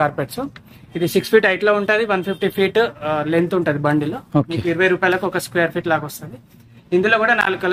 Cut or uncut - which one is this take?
uncut